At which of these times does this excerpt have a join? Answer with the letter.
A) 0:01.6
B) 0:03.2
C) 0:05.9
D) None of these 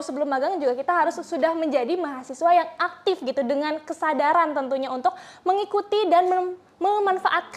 D